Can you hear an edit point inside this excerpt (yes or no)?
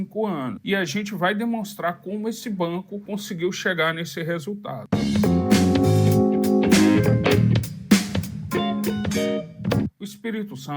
yes